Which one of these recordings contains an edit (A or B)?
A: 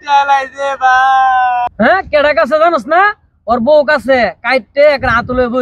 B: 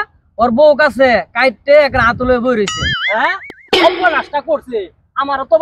A